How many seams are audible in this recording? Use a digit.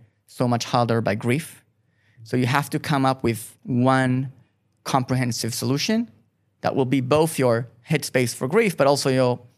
1